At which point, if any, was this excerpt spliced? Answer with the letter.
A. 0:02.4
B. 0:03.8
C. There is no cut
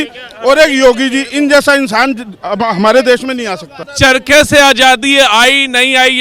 B